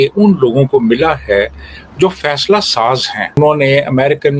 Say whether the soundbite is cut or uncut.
cut